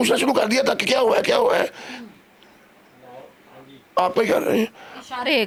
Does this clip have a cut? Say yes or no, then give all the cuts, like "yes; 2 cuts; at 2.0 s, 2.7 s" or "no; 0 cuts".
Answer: no; 0 cuts